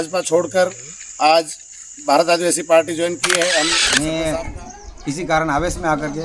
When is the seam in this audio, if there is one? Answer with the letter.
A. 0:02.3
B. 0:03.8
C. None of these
B